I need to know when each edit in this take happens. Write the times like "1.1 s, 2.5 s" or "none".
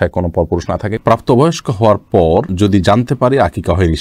1.0 s